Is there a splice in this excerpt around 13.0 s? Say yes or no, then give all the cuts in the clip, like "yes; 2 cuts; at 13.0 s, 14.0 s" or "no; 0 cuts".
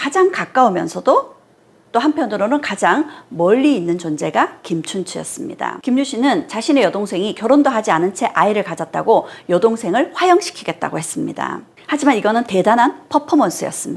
no; 2 cuts; at 5.8 s, 11.7 s